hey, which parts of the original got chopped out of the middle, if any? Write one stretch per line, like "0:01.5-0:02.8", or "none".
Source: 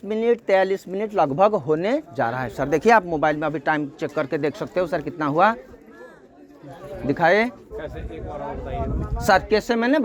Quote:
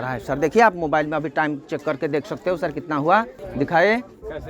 0:05.7-0:06.9